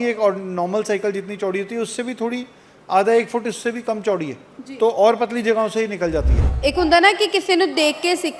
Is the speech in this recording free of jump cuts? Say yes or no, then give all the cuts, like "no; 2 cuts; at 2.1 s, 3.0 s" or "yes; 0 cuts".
no; 1 cut; at 6.4 s